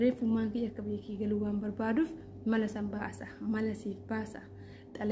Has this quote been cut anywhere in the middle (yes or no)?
yes